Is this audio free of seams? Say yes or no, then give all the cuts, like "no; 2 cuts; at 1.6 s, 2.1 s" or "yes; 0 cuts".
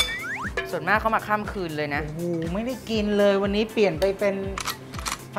yes; 0 cuts